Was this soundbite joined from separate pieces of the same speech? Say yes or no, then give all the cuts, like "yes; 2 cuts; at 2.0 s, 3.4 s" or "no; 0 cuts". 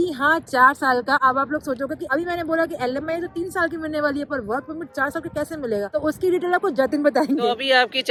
no; 0 cuts